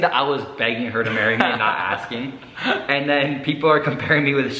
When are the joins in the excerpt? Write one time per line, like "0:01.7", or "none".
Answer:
none